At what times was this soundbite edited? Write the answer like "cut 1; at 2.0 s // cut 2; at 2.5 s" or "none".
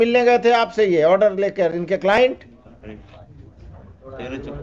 cut 1; at 2.8 s